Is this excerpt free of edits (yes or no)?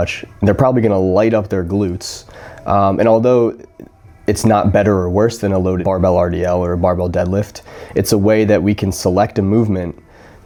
yes